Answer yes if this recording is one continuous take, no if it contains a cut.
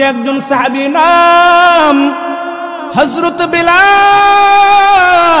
yes